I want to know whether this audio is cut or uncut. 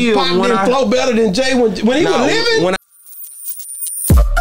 cut